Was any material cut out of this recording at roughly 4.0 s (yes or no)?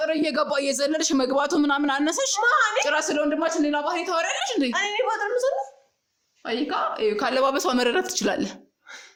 no